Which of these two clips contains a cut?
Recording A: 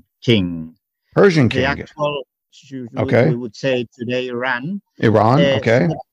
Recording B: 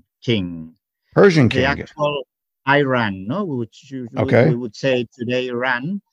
A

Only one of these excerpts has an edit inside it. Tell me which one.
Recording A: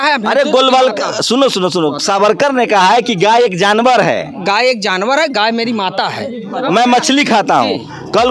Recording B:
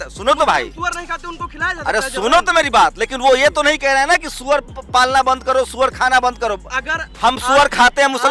A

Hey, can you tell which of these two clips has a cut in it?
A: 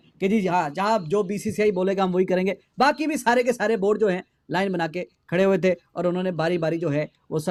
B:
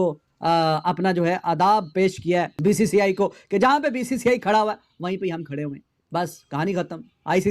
B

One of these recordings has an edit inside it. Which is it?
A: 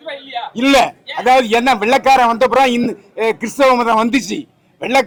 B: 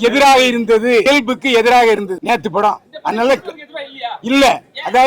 B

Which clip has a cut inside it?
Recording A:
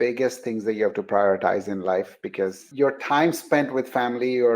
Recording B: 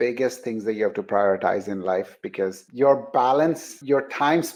A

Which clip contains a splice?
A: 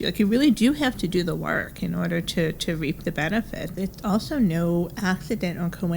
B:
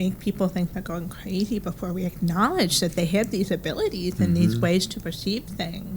A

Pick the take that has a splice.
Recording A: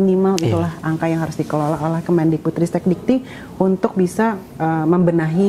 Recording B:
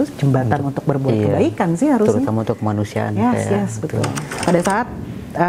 B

